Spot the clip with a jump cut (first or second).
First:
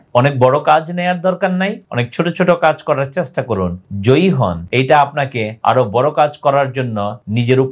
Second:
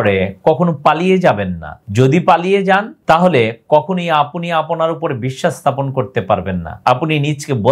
second